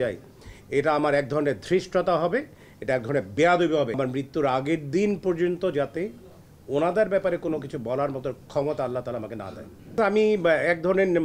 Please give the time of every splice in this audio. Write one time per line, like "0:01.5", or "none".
0:04.0
0:09.9